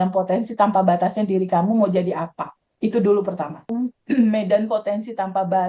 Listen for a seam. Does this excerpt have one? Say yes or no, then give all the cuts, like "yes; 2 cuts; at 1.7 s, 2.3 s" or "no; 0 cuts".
yes; 1 cut; at 3.7 s